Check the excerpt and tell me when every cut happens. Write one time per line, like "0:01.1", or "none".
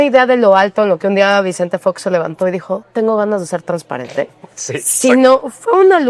none